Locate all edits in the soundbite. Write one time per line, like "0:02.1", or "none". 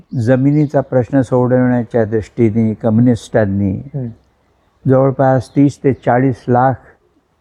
none

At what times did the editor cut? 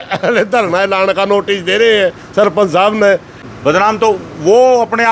0:03.3

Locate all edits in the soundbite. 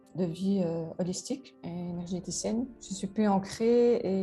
0:01.6
0:02.8

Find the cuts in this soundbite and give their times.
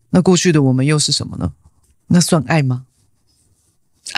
none

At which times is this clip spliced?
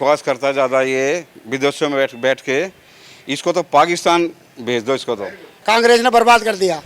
0:05.6

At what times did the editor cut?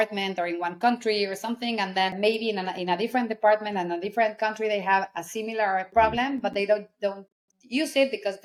none

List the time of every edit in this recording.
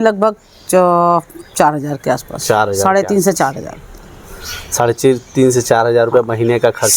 none

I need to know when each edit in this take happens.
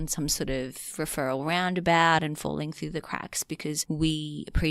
0:03.8

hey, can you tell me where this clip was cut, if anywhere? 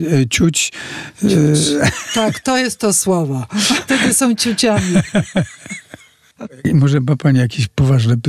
0:02.4
0:03.8
0:06.6

